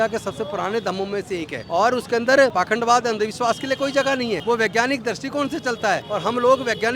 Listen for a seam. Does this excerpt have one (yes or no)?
yes